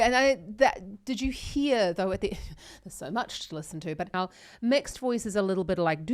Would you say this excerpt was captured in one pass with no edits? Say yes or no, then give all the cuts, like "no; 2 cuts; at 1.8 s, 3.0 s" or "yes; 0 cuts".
no; 1 cut; at 4.1 s